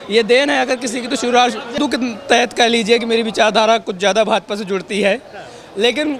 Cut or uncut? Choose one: cut